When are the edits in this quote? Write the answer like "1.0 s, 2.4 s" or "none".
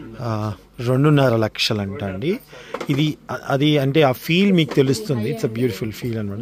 none

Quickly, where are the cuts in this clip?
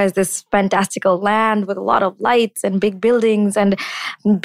none

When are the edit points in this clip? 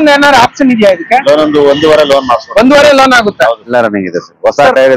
3.7 s

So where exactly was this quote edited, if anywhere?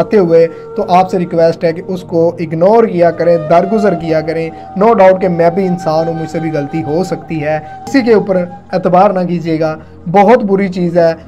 7.9 s

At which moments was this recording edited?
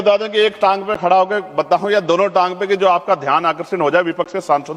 none

